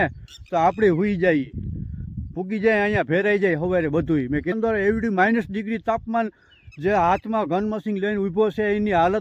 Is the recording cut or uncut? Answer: cut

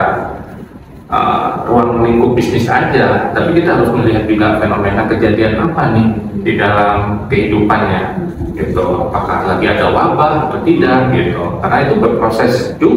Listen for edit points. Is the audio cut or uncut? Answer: uncut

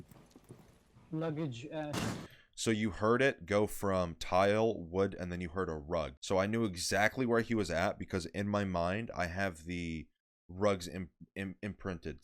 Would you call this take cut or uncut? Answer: cut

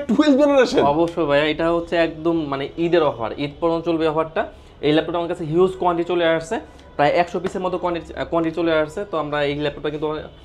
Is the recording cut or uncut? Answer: uncut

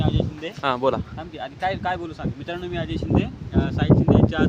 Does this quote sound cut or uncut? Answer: uncut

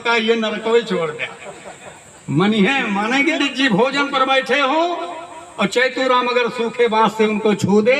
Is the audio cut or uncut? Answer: cut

